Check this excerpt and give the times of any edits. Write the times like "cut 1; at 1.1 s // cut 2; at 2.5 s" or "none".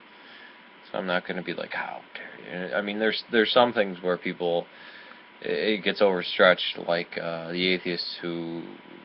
cut 1; at 1.1 s